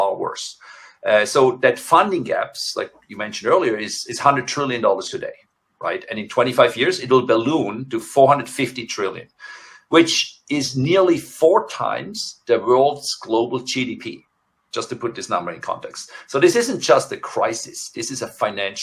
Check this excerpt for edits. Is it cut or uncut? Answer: uncut